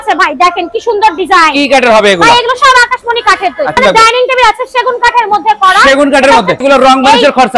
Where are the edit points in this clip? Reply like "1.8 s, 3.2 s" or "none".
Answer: 3.8 s, 6.6 s